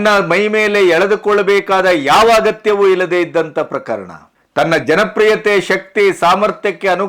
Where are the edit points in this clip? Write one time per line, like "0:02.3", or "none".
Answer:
none